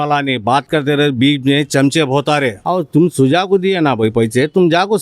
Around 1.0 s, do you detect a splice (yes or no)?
no